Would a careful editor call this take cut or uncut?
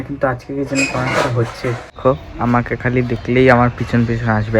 cut